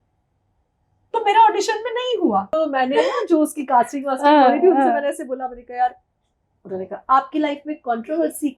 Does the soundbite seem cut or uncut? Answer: cut